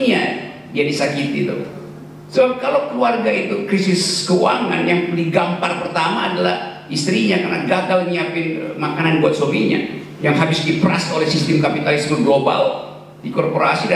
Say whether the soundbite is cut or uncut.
uncut